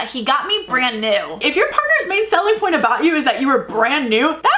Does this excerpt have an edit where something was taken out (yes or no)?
yes